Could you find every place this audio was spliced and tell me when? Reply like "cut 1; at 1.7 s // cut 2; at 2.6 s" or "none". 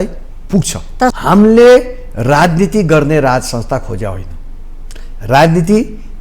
cut 1; at 1.1 s